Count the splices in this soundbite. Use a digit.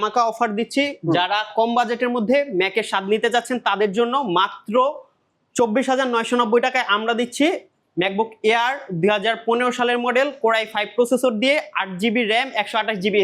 0